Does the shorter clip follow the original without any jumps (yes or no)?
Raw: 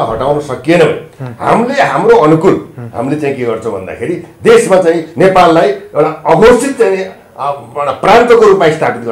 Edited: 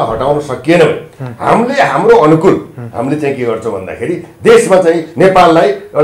yes